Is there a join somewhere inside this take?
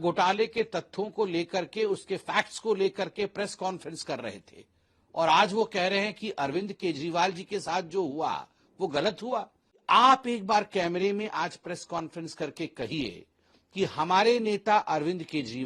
yes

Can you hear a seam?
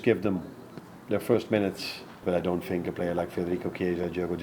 yes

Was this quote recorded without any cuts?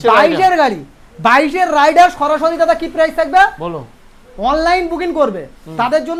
yes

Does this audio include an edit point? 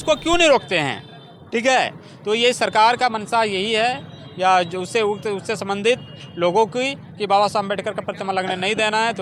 no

